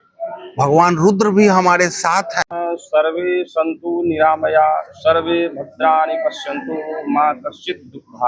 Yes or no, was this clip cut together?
yes